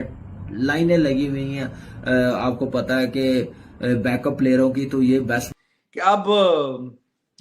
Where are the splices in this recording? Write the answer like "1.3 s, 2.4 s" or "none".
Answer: 5.5 s